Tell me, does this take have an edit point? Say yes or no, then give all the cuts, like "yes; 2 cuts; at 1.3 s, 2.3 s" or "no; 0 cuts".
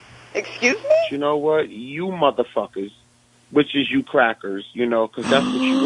yes; 1 cut; at 1.1 s